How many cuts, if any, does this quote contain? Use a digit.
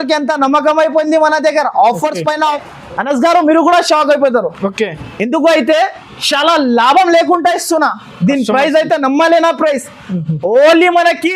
1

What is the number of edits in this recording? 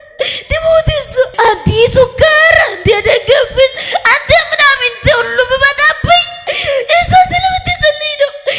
1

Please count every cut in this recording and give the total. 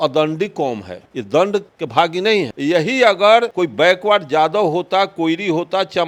2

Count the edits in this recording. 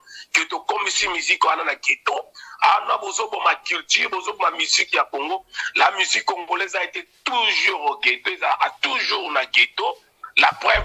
0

